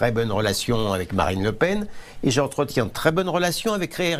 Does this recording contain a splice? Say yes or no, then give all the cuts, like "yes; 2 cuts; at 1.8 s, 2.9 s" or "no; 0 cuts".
no; 0 cuts